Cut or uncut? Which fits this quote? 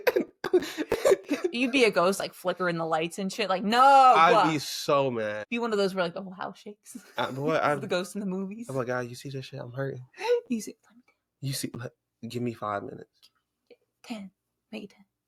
uncut